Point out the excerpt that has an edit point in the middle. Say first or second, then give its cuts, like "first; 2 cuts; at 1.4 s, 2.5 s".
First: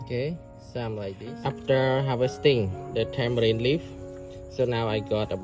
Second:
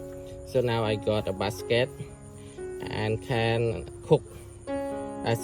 first; 1 cut; at 1.4 s